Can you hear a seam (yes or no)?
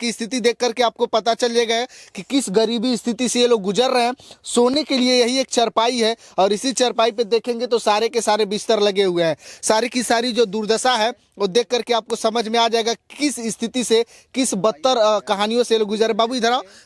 no